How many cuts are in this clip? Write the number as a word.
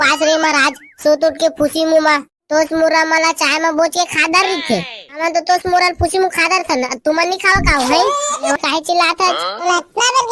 one